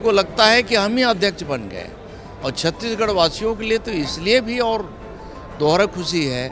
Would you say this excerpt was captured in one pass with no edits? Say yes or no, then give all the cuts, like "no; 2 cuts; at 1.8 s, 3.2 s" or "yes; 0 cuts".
yes; 0 cuts